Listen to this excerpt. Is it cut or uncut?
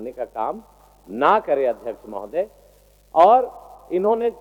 uncut